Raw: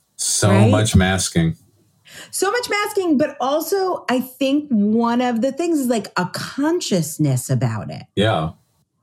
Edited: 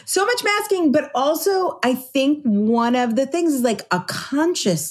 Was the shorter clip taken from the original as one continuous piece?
yes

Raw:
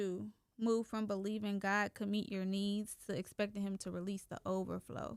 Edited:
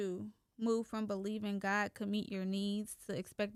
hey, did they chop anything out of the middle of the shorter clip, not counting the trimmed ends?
no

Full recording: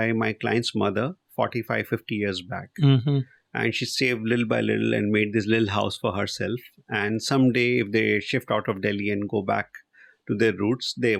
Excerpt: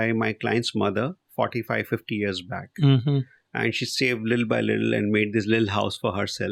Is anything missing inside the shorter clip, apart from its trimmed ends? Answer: no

